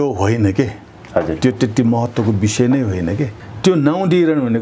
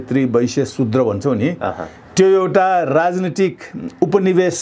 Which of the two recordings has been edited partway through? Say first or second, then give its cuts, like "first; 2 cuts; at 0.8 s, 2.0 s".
first; 1 cut; at 3.3 s